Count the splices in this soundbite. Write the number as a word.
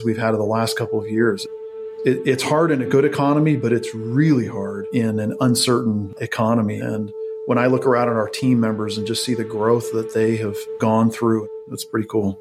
two